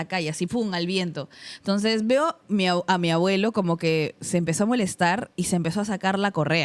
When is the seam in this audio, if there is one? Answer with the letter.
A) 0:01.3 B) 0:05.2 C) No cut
C